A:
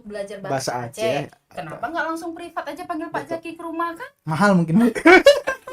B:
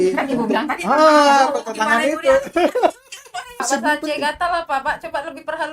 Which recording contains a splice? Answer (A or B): B